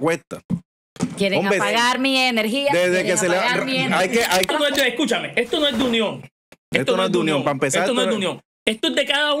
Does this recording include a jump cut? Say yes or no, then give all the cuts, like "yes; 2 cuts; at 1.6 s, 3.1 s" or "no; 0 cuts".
yes; 1 cut; at 4.5 s